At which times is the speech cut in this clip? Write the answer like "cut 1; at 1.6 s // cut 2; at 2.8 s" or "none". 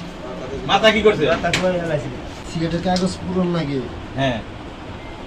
cut 1; at 2.3 s